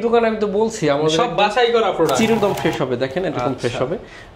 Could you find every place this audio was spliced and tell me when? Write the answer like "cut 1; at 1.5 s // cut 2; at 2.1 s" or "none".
cut 1; at 2.4 s